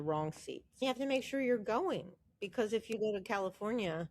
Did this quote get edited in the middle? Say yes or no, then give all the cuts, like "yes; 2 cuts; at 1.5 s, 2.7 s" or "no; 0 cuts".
yes; 2 cuts; at 0.8 s, 2.9 s